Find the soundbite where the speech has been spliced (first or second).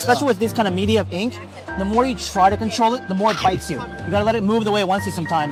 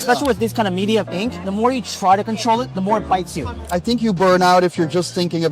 second